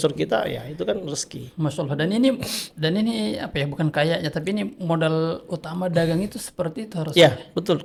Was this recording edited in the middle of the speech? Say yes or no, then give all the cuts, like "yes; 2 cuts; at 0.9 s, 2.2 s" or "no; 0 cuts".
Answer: no; 0 cuts